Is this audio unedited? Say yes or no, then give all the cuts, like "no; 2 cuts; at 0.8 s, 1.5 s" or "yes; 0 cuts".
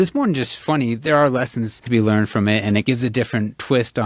no; 2 cuts; at 1.8 s, 2.8 s